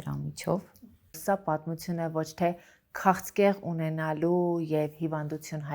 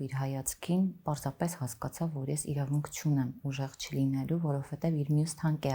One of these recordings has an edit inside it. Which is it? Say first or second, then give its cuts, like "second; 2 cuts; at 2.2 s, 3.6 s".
first; 1 cut; at 1.2 s